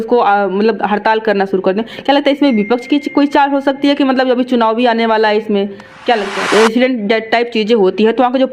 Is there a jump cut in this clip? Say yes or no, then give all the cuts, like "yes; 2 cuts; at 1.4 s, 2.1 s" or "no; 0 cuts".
yes; 1 cut; at 6.5 s